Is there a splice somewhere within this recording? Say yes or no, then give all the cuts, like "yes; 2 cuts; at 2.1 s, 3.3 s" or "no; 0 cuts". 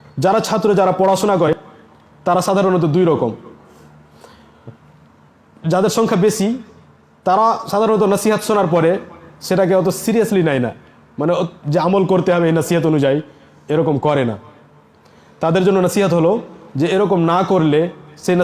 yes; 1 cut; at 1.5 s